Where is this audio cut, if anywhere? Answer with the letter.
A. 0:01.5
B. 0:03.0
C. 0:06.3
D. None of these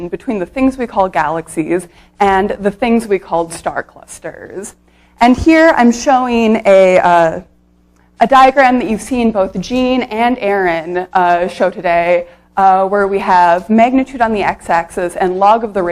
B